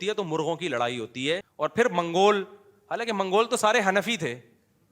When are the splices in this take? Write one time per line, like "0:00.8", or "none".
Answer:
0:01.5